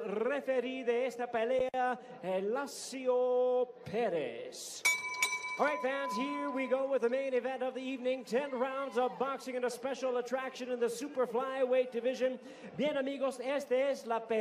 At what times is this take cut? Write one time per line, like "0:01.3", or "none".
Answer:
none